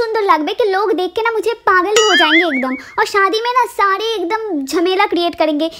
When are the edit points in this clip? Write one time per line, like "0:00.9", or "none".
none